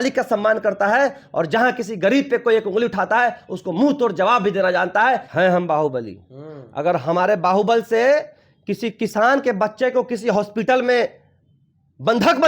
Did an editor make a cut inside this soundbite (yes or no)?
yes